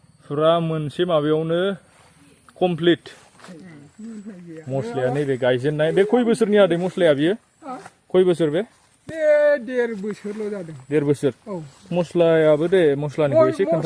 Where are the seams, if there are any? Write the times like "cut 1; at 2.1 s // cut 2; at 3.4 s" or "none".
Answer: cut 1; at 3.4 s